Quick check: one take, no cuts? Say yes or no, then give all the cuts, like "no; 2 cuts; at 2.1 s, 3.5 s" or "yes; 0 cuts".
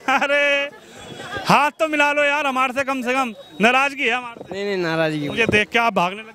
yes; 0 cuts